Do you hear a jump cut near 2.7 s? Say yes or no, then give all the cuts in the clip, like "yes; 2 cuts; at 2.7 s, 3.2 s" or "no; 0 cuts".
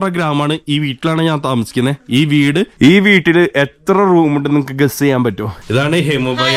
yes; 2 cuts; at 2.7 s, 5.5 s